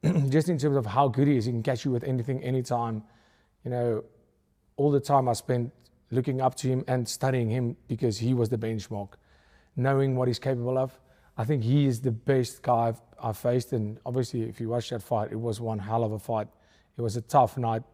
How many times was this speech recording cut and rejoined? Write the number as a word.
zero